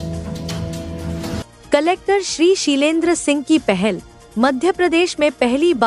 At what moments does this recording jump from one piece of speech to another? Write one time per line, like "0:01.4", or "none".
0:01.5